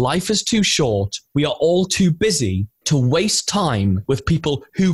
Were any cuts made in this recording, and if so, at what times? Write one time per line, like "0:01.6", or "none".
0:01.2
0:02.7
0:04.0